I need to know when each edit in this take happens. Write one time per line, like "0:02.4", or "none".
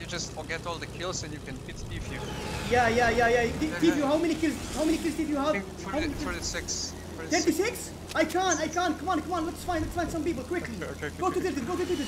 none